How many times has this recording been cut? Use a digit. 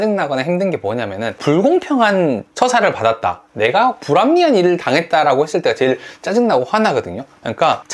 0